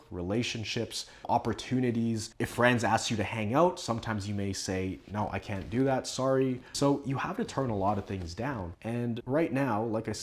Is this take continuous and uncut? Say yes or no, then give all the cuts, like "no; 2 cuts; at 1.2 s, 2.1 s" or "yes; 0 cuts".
no; 1 cut; at 6.7 s